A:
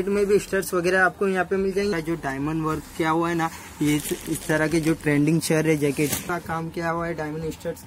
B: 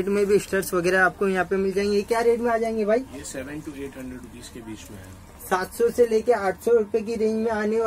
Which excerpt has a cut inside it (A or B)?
A